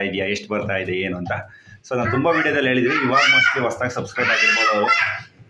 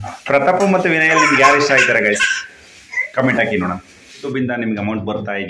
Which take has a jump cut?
second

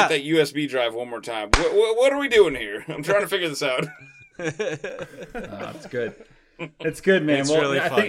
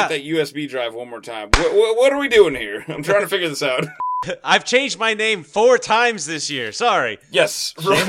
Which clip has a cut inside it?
second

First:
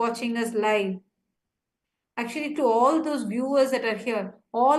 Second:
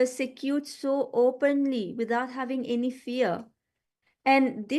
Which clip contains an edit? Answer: second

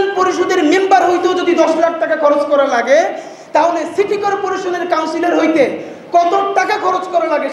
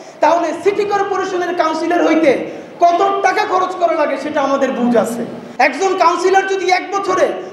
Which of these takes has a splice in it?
second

